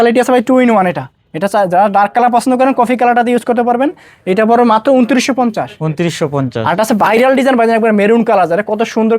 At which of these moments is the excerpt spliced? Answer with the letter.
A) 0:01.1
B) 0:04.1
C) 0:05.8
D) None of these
D